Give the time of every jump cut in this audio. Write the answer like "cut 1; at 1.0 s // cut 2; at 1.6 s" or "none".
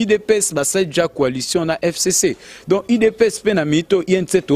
none